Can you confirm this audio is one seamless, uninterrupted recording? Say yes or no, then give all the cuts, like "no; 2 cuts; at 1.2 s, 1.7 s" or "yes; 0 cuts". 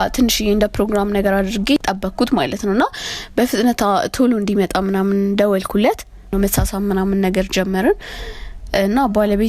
no; 2 cuts; at 1.8 s, 6.2 s